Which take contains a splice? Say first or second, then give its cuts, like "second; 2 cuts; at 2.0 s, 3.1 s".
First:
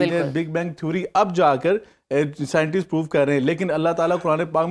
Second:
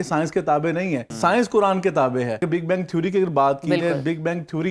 second; 2 cuts; at 1.1 s, 2.4 s